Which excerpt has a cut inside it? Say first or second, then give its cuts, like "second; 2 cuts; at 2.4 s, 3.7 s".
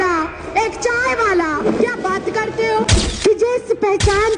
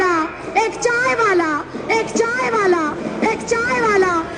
first; 2 cuts; at 1.6 s, 3.0 s